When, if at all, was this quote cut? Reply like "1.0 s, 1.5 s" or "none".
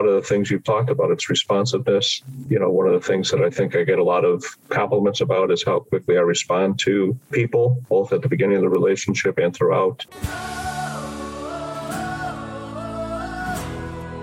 3.3 s, 10.1 s